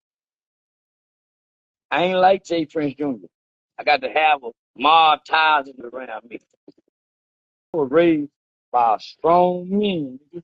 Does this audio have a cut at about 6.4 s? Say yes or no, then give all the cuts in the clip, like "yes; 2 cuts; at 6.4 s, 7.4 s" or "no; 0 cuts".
no; 1 cut; at 9.4 s